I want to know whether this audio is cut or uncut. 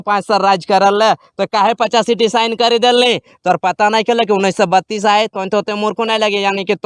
uncut